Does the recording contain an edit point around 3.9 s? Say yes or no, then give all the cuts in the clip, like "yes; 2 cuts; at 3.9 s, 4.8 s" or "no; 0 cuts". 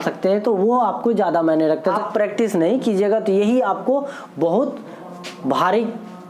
no; 1 cut; at 2.0 s